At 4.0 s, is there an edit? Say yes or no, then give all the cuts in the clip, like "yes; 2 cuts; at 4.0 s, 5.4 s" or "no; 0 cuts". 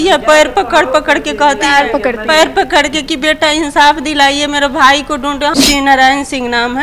no; 1 cut; at 5.5 s